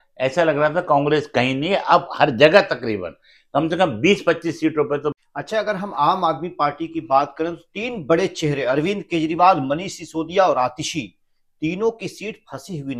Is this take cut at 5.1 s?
yes; 1 cut; at 5.1 s

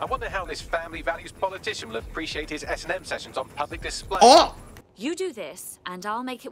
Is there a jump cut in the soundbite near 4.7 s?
yes; 1 cut; at 4.7 s

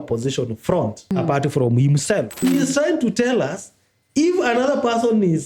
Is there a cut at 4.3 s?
no; 2 cuts; at 1.1 s, 2.4 s

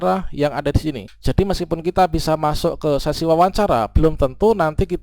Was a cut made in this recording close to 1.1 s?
yes; 1 cut; at 1.1 s

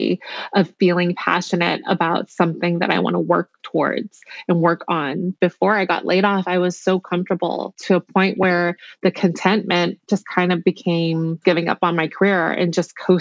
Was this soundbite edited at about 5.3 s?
yes; 3 cuts; at 5.3 s, 7.8 s, 11.4 s

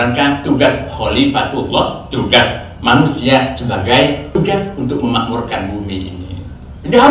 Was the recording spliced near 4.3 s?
yes; 1 cut; at 4.3 s

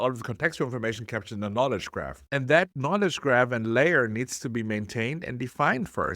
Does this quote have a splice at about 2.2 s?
yes; 1 cut; at 2.2 s

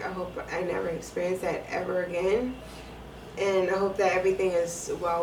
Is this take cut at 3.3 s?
no; 0 cuts

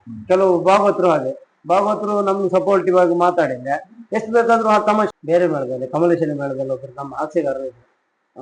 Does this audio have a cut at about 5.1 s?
yes; 1 cut; at 5.1 s

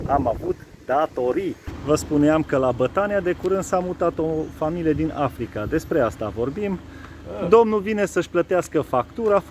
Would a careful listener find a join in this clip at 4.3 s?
no; 1 cut; at 1.7 s

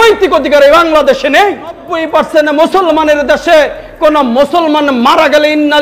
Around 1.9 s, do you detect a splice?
yes; 1 cut; at 1.9 s

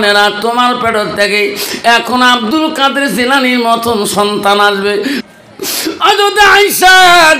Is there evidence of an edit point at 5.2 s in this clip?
yes; 1 cut; at 5.2 s

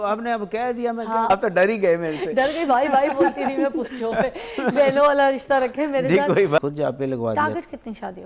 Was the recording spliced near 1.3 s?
yes; 2 cuts; at 1.3 s, 6.6 s

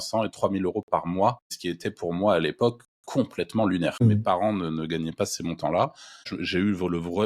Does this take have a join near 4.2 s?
yes; 3 cuts; at 1.5 s, 4.2 s, 6.4 s

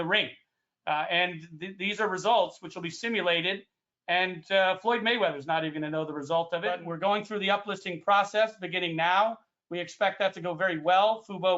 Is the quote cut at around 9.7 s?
no; 1 cut; at 6.9 s

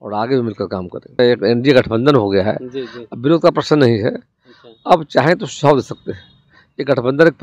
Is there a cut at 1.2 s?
yes; 1 cut; at 1.2 s

